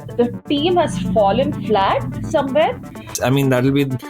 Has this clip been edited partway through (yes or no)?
yes